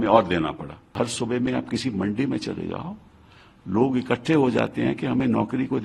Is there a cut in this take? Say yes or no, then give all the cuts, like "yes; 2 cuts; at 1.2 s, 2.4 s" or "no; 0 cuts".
yes; 1 cut; at 0.9 s